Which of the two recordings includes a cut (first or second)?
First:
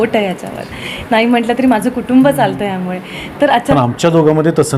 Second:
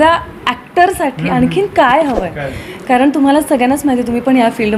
first